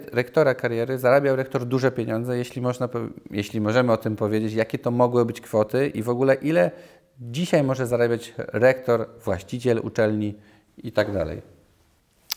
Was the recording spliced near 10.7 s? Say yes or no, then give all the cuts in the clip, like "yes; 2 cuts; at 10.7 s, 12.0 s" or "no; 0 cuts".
no; 0 cuts